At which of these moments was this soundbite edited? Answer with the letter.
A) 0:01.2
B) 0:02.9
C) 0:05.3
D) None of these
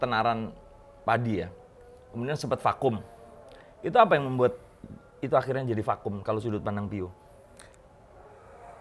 D